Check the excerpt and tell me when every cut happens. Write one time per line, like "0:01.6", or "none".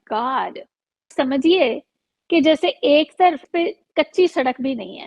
0:01.1
0:03.4